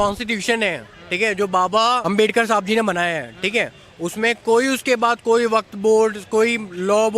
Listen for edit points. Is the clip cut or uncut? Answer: cut